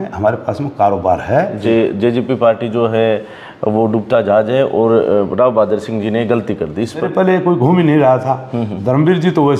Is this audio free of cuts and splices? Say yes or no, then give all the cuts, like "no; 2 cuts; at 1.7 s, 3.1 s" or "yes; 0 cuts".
no; 2 cuts; at 1.6 s, 7.1 s